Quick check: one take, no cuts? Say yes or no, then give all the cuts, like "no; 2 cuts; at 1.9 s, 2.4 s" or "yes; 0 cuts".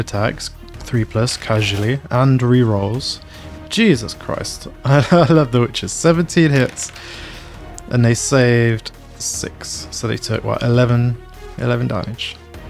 yes; 0 cuts